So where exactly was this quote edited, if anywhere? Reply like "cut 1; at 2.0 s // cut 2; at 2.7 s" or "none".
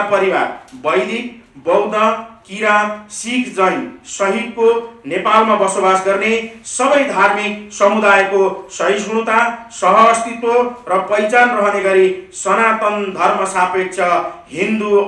none